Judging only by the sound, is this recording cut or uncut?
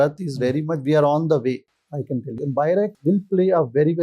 cut